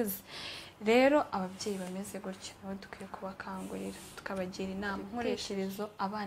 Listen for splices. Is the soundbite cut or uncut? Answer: cut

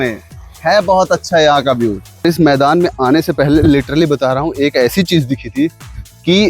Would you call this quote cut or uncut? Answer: cut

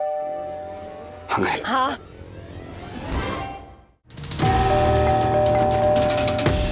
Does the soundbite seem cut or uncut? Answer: cut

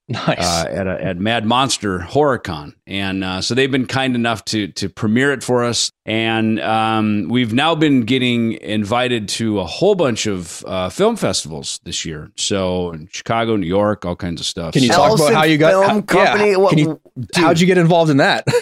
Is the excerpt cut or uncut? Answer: cut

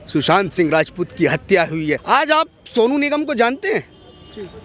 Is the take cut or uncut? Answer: cut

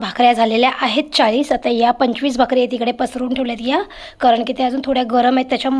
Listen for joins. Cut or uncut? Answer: uncut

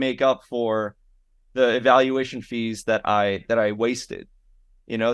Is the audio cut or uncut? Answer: uncut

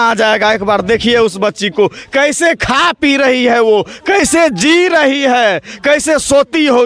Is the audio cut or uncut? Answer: uncut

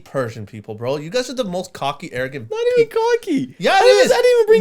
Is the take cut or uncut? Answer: uncut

